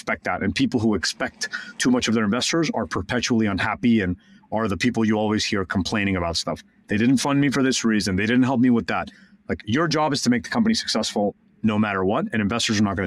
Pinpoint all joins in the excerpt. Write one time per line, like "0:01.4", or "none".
none